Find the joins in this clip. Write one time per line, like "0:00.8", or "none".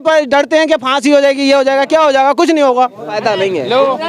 0:03.2